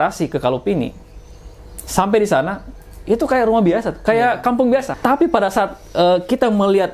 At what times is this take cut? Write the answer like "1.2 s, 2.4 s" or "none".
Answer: 4.9 s